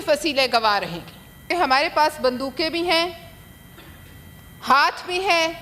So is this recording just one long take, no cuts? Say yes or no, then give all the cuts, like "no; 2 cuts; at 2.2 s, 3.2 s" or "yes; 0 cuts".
no; 1 cut; at 1.5 s